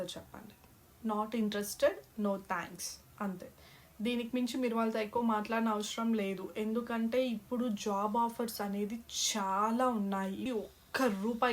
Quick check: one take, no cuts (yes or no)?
no